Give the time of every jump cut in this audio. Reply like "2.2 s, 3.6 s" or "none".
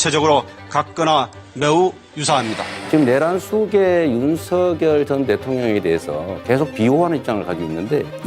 2.7 s